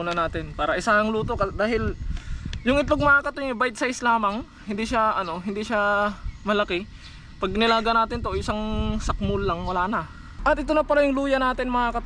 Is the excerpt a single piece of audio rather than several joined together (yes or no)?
no